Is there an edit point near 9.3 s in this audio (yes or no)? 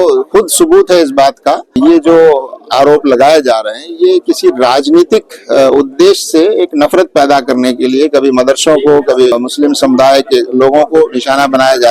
yes